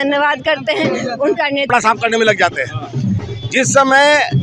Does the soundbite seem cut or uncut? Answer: cut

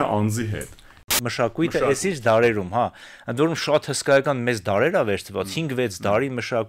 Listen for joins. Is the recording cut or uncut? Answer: cut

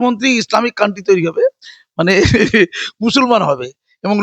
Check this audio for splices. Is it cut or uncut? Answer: uncut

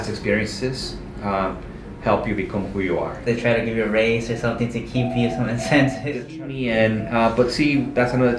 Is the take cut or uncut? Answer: cut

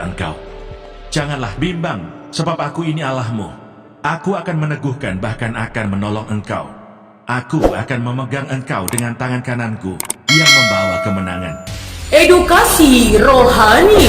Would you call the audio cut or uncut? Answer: uncut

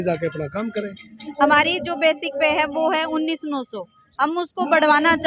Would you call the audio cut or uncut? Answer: cut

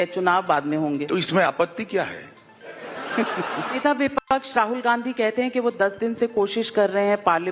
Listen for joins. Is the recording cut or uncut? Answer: cut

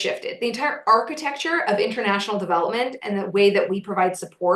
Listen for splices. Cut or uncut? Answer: uncut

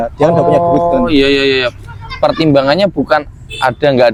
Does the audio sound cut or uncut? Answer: uncut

